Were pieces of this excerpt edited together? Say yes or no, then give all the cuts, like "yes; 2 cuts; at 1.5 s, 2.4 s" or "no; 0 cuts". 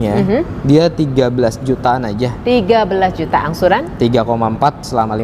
no; 0 cuts